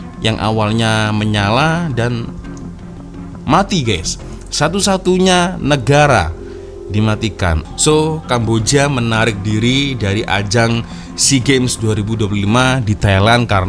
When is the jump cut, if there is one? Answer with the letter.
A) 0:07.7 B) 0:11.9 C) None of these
A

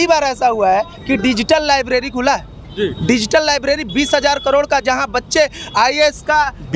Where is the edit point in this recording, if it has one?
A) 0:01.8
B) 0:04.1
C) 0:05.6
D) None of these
D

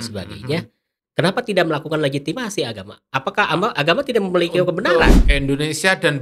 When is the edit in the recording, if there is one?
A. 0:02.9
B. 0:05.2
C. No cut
B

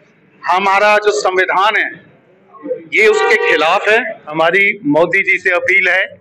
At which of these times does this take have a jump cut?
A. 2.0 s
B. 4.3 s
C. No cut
B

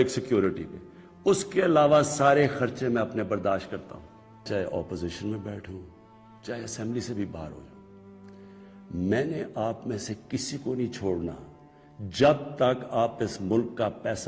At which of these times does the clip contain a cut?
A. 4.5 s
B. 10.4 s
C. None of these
A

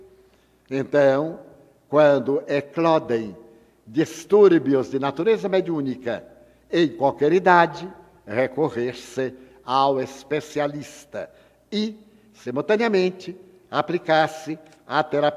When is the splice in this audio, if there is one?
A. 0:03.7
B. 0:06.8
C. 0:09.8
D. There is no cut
C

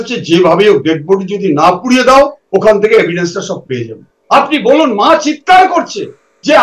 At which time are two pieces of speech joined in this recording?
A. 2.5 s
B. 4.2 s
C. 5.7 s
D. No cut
B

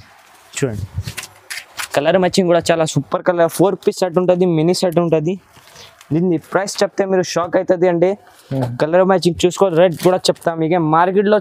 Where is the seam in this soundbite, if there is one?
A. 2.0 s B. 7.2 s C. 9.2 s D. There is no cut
D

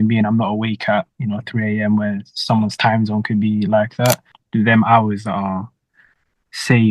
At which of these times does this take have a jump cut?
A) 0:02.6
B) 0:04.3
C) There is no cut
B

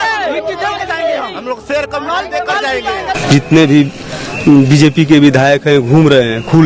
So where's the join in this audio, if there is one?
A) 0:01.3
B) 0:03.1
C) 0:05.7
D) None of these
B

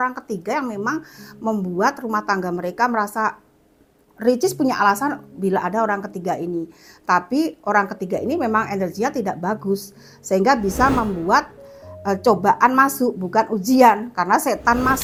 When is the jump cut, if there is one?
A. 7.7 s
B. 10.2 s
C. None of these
C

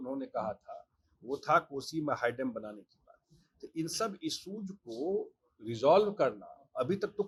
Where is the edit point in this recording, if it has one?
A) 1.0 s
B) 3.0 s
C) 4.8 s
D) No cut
D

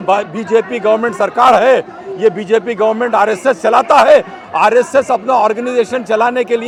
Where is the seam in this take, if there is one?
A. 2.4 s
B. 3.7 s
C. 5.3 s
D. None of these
D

